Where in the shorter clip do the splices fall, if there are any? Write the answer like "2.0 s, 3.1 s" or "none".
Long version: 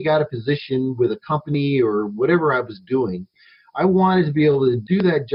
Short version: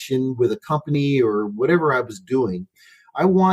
none